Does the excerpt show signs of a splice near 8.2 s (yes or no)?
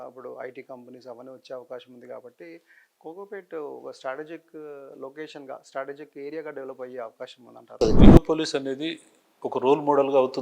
yes